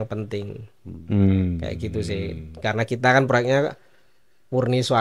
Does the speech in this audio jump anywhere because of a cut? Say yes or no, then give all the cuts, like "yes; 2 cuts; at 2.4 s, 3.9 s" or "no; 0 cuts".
no; 0 cuts